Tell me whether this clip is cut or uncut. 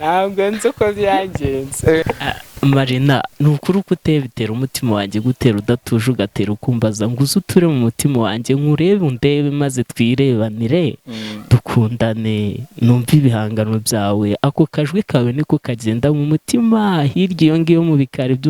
cut